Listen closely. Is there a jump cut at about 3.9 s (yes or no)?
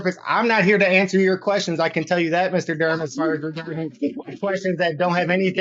no